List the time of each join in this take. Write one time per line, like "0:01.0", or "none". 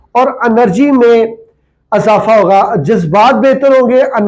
none